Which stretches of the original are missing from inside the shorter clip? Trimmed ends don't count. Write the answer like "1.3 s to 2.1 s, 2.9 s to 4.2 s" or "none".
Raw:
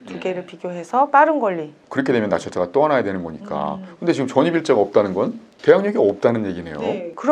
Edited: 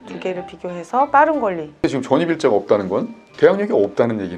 1.7 s to 3.9 s